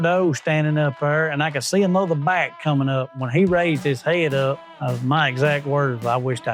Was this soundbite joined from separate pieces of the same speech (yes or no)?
no